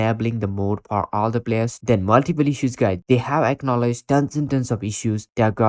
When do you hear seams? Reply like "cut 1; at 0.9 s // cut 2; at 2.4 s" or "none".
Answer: cut 1; at 1.8 s // cut 2; at 3.0 s